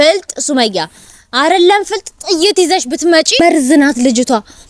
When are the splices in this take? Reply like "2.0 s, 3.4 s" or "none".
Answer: 3.4 s